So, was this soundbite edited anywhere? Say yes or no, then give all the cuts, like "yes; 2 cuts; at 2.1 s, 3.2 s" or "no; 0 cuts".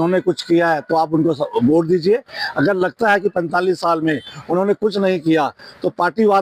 no; 0 cuts